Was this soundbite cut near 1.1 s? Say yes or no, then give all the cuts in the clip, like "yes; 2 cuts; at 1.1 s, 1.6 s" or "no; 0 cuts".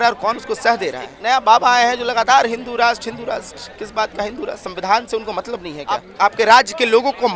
yes; 2 cuts; at 1.1 s, 6.1 s